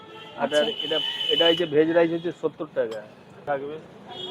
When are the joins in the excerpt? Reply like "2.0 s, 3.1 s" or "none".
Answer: 3.4 s